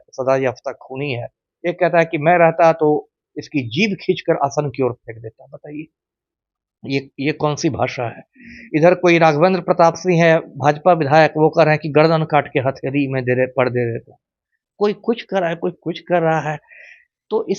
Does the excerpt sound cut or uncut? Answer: uncut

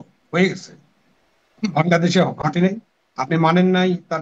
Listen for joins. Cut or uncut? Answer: uncut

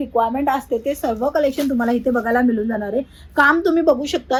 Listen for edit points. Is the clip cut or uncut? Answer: uncut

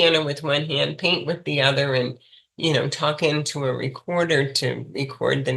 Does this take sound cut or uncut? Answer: uncut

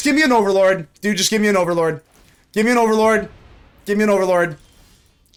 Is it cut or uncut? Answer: uncut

